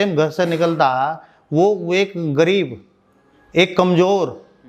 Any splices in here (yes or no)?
no